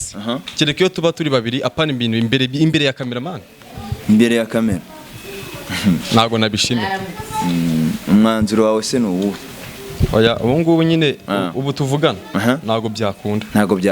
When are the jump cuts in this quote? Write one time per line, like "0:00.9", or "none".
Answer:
none